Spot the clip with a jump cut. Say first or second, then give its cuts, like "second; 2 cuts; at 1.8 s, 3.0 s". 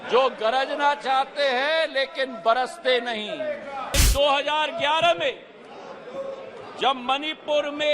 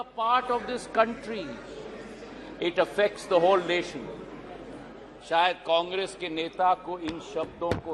first; 1 cut; at 3.9 s